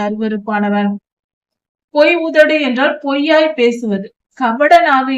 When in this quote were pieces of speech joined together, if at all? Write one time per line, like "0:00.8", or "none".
0:01.2

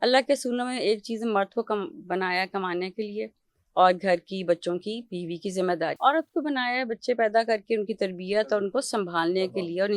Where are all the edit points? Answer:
0:06.0

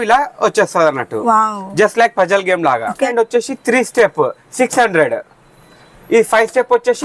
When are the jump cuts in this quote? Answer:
0:03.1

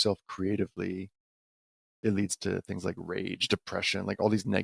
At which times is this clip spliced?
none

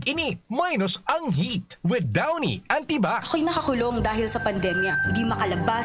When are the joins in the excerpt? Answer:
none

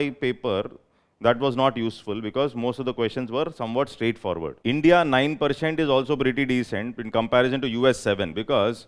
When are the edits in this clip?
0:04.6

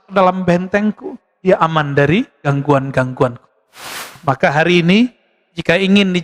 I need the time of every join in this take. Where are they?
0:04.1

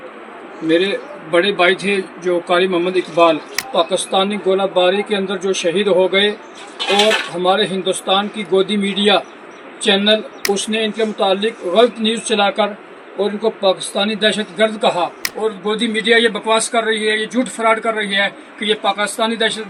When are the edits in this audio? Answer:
0:03.5
0:10.3
0:15.2

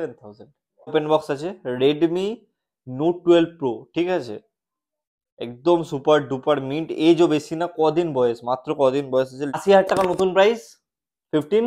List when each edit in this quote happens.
0:00.9
0:09.6

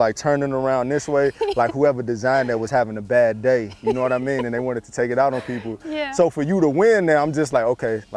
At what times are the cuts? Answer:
none

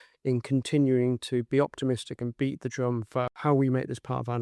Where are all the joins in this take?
0:03.3

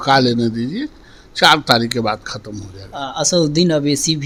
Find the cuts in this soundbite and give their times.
none

